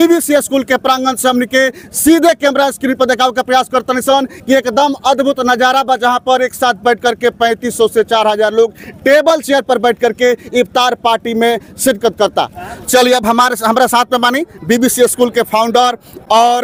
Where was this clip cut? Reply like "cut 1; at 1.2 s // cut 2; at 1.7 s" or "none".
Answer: none